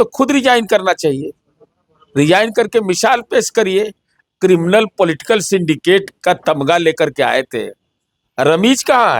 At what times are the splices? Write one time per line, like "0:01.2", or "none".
none